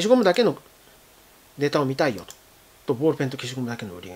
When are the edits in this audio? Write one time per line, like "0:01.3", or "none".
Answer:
none